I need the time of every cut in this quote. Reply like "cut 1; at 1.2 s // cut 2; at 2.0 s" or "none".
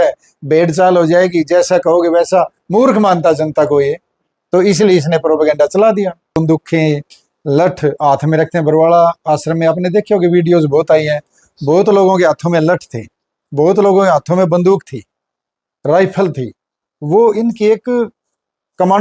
cut 1; at 6.4 s

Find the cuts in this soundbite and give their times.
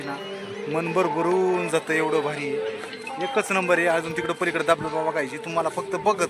none

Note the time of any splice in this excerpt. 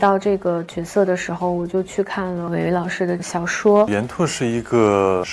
cut 1; at 2.5 s // cut 2; at 3.2 s // cut 3; at 3.9 s

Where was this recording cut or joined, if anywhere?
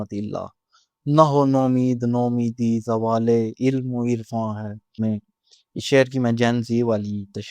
cut 1; at 5.0 s

